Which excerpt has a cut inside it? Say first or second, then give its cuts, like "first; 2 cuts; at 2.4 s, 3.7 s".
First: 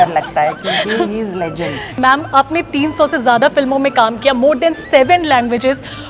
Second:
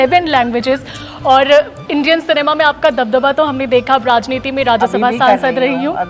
first; 1 cut; at 2.0 s